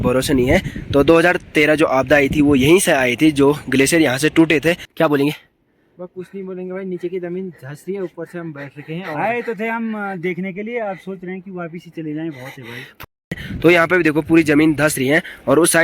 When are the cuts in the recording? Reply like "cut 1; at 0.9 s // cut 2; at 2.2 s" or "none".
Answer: cut 1; at 4.9 s // cut 2; at 13.0 s